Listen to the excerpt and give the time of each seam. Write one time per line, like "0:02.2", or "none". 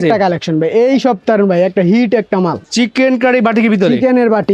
0:02.6